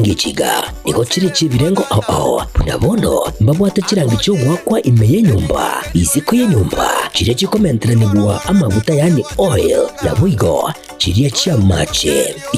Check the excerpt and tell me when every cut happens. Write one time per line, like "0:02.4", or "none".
0:02.0